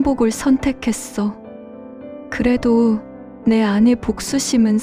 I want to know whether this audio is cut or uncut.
uncut